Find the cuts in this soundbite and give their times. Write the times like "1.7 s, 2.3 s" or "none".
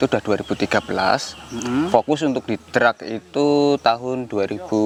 none